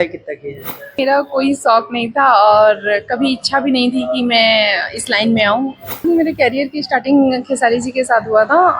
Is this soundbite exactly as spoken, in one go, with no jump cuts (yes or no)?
no